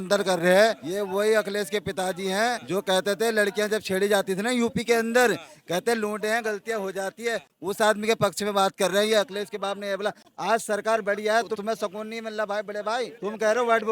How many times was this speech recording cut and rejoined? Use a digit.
0